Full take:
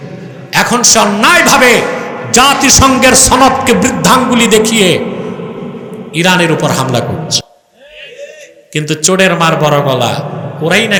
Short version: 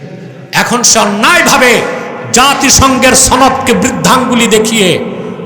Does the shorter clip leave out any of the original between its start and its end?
no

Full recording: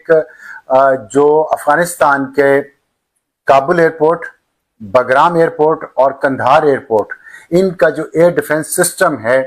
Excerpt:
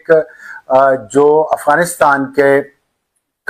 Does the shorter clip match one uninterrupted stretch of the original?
yes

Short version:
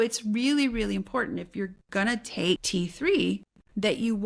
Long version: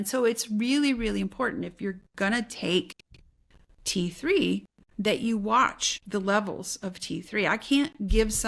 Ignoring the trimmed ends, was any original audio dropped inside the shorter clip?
yes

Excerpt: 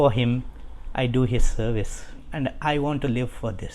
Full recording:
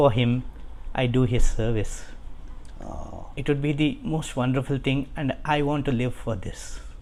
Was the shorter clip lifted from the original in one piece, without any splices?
no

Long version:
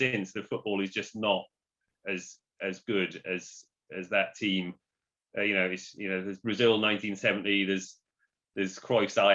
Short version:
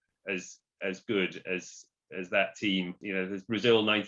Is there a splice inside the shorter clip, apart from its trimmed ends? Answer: yes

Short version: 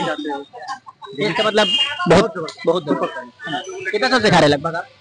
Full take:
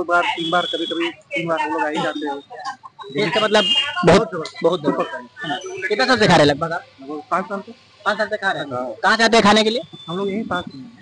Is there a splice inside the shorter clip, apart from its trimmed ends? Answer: no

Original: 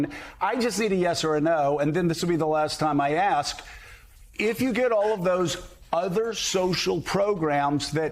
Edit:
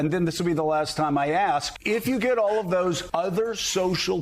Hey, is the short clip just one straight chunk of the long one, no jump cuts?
no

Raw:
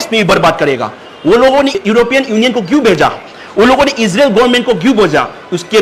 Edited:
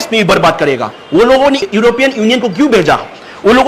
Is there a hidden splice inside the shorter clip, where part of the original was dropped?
yes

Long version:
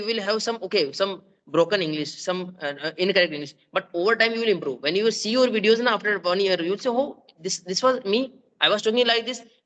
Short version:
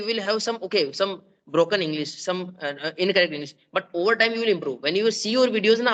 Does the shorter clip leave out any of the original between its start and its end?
no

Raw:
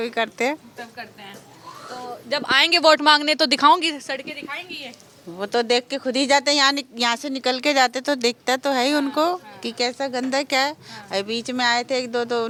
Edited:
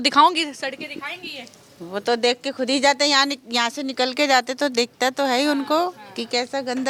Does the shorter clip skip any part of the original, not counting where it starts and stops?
no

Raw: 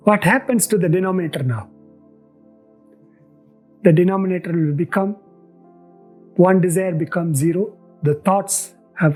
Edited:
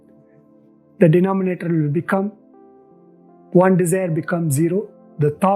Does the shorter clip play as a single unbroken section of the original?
no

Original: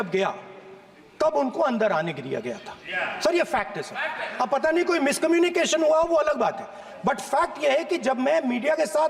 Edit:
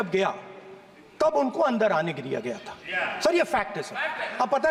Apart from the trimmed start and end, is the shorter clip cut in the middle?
no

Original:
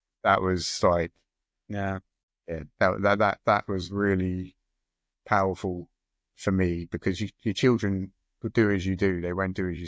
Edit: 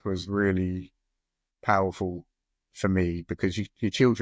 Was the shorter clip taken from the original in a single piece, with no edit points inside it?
yes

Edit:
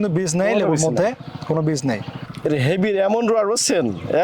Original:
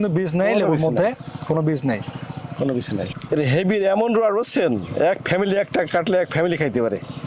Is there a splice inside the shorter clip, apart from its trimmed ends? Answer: yes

